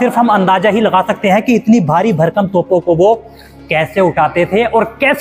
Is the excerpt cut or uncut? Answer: uncut